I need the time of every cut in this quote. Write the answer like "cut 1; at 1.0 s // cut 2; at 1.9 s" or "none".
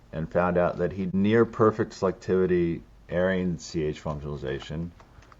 cut 1; at 1.1 s